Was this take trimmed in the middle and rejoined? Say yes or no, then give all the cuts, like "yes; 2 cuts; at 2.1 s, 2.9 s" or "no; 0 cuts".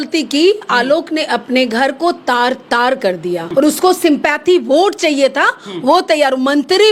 yes; 1 cut; at 3.5 s